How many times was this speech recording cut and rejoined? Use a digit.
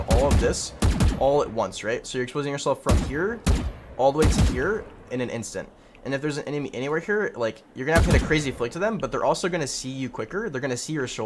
0